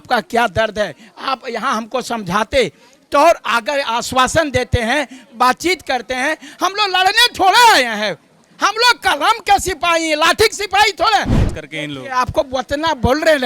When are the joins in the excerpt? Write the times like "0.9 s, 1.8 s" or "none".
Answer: 11.4 s